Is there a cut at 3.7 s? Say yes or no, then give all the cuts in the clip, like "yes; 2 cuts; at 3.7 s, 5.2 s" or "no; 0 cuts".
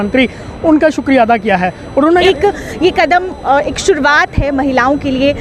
no; 1 cut; at 2.2 s